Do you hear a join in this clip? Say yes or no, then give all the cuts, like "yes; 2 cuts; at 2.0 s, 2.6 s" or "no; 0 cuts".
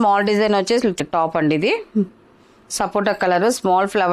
yes; 1 cut; at 1.0 s